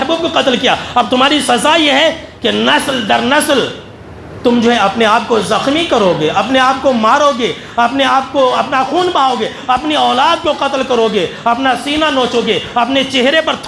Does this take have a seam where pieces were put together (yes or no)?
no